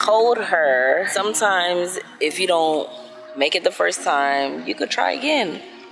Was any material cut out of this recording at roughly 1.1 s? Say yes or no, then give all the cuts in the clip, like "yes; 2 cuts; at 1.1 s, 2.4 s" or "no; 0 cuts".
yes; 1 cut; at 1.1 s